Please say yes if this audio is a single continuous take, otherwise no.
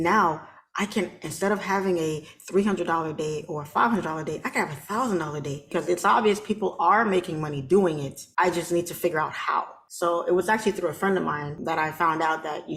no